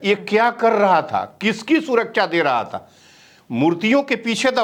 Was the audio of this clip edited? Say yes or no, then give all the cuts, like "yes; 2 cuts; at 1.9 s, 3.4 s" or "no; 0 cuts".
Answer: no; 0 cuts